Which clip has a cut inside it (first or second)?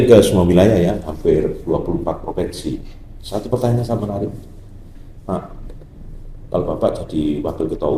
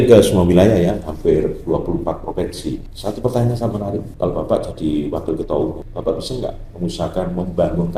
second